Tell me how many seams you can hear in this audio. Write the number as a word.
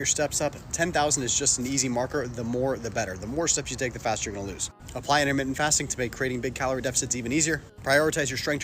two